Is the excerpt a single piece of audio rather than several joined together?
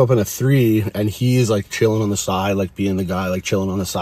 yes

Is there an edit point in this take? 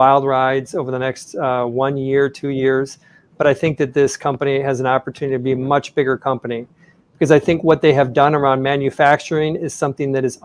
yes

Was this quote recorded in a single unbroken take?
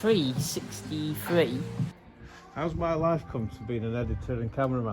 no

